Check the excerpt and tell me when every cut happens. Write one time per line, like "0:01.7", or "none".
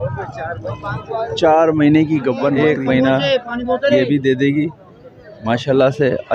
0:02.6